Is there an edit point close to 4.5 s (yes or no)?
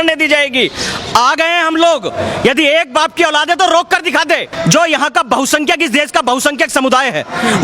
yes